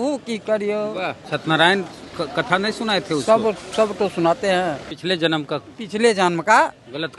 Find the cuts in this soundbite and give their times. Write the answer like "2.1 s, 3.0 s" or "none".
1.2 s, 5.0 s

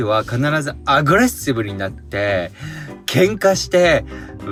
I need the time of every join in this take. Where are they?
none

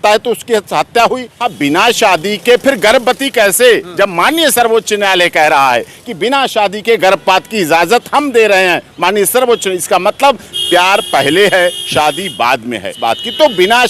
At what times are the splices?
1.4 s, 12.9 s

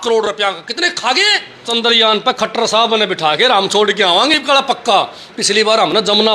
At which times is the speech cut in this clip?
1.7 s

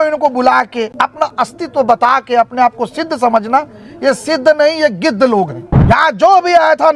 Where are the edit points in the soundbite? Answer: 0.9 s, 5.7 s

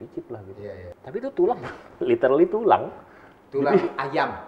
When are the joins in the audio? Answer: 0.9 s

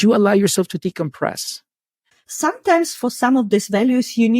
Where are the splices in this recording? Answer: 2.1 s

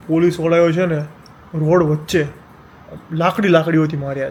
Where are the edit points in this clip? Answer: none

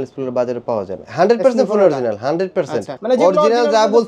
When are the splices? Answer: 1.0 s, 2.9 s

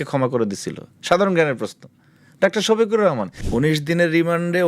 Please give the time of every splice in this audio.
3.3 s

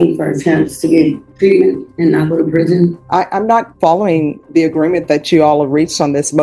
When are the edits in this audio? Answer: 1.3 s, 1.9 s, 3.0 s, 4.4 s

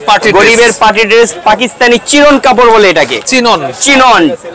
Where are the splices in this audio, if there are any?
none

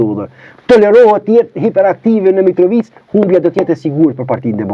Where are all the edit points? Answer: none

